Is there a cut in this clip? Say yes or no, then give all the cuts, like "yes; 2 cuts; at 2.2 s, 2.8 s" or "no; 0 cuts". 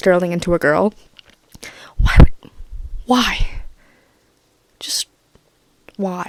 no; 0 cuts